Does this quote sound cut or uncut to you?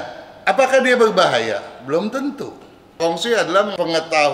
cut